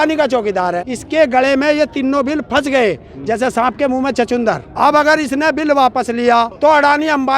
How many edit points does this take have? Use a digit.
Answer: 3